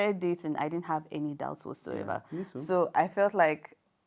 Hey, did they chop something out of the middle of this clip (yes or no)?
no